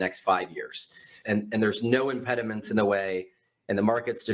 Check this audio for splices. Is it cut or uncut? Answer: cut